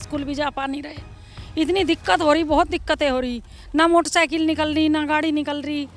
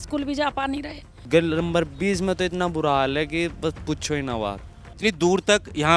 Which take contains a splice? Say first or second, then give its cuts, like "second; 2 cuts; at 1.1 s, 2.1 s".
second; 2 cuts; at 1.2 s, 4.9 s